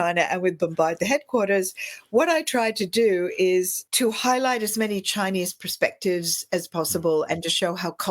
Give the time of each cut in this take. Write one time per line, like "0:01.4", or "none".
0:03.8